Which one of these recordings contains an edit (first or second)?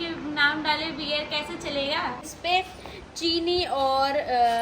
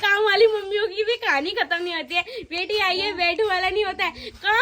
first